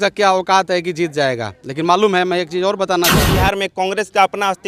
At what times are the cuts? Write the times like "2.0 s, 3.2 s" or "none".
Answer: 3.3 s